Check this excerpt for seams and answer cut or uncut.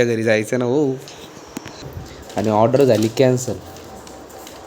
cut